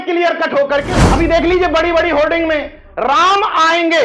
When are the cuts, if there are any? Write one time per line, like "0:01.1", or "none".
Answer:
0:01.0